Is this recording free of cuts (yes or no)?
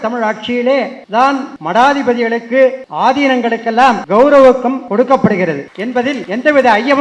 no